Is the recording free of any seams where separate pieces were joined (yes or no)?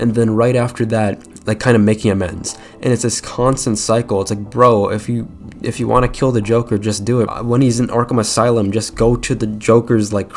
no